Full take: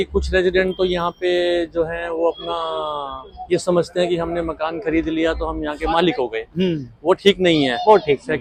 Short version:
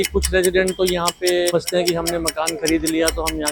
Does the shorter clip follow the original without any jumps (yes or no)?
no